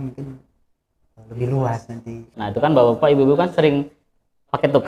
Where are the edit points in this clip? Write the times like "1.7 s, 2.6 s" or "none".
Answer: 2.4 s